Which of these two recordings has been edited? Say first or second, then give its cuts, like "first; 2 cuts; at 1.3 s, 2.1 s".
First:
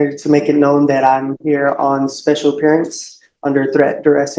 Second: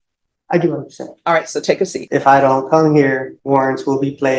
second; 2 cuts; at 2.0 s, 3.3 s